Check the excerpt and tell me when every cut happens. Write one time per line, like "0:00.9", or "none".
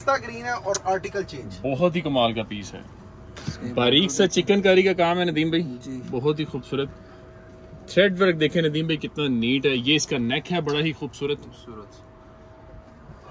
none